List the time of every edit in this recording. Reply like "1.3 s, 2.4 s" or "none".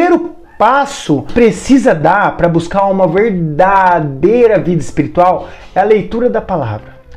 1.3 s

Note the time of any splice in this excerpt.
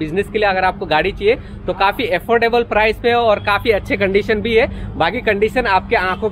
none

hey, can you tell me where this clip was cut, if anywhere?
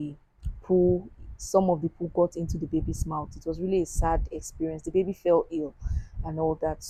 none

